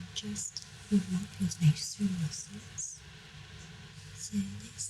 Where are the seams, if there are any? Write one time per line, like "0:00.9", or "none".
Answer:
0:03.9